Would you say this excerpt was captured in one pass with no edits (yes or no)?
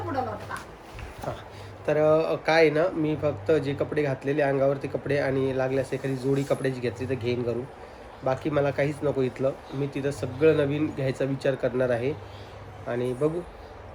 yes